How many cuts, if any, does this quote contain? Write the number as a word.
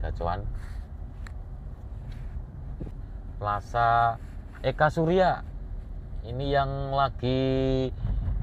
one